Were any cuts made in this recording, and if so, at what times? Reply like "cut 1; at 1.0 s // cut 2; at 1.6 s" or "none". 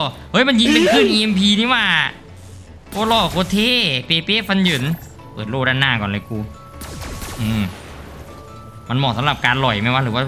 none